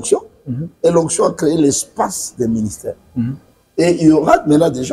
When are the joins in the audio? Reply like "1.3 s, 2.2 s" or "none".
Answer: none